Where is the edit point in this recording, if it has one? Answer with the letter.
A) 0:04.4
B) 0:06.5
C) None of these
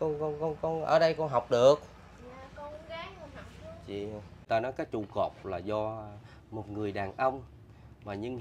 A